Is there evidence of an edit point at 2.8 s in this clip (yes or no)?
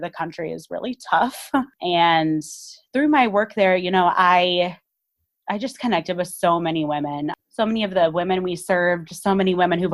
yes